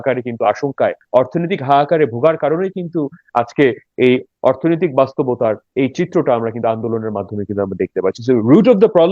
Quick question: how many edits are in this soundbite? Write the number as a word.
two